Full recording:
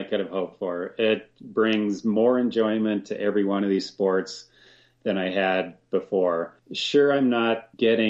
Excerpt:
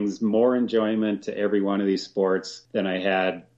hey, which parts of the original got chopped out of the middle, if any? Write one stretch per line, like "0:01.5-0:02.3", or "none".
0:04.4-0:04.9